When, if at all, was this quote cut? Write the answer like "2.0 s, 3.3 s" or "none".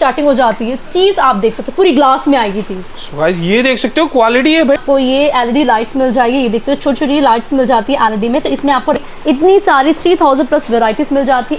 4.8 s, 9.0 s